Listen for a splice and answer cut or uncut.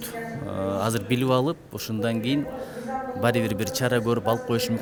uncut